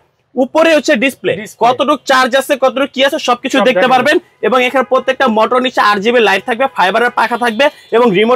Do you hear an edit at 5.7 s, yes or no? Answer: no